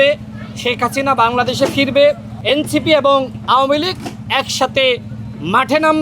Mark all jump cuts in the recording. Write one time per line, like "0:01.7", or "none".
0:02.3

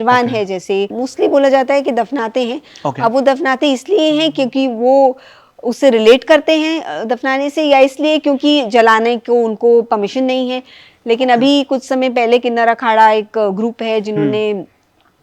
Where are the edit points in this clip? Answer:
0:01.0

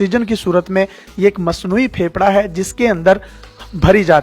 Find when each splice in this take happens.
none

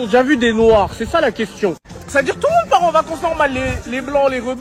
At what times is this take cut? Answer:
none

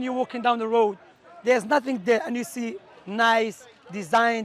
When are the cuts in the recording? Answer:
none

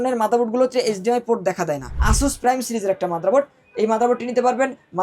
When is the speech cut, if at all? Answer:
0:01.9

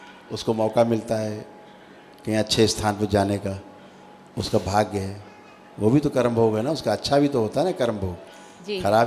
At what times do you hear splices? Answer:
none

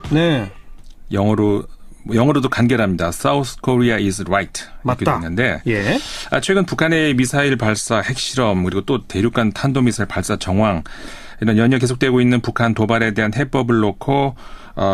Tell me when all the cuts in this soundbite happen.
none

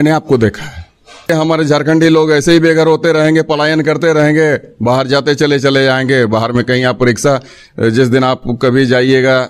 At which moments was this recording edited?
0:01.3

